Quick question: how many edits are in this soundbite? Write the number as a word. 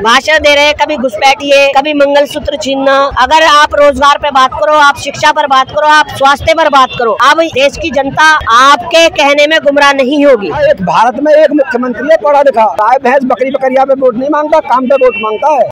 six